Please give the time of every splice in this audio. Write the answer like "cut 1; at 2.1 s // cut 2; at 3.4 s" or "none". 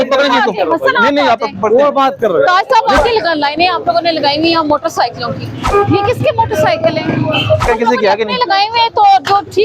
cut 1; at 3.0 s // cut 2; at 5.6 s // cut 3; at 7.6 s

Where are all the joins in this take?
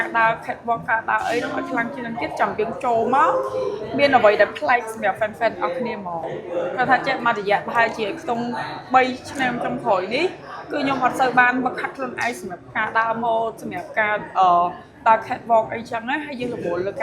cut 1; at 6.3 s

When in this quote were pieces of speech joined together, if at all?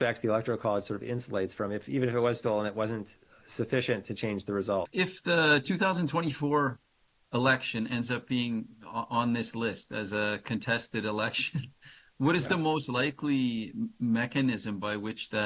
cut 1; at 4.9 s

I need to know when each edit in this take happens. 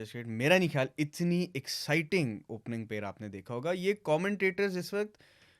none

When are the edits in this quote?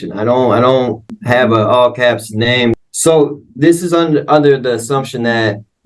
cut 1; at 1.2 s // cut 2; at 2.7 s

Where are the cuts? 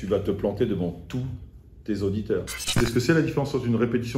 cut 1; at 2.6 s

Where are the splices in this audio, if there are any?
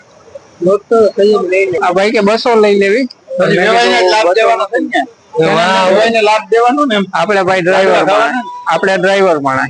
cut 1; at 1.8 s

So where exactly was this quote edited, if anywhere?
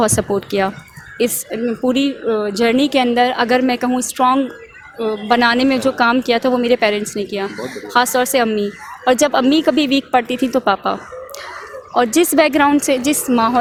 none

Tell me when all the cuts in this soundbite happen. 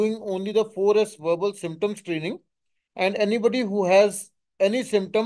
none

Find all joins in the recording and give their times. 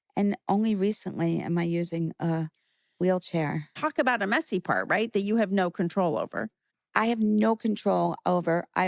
cut 1; at 3.8 s

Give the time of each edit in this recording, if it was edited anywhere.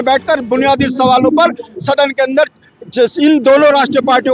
none

